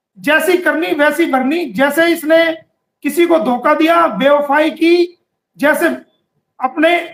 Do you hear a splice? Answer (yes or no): no